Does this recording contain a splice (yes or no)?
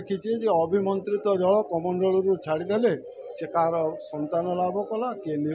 no